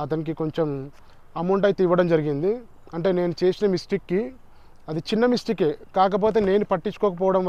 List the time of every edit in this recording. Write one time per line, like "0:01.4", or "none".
none